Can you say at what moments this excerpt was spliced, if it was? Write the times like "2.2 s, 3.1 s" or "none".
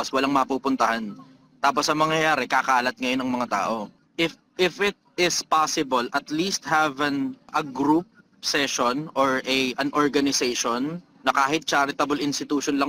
4.0 s, 7.5 s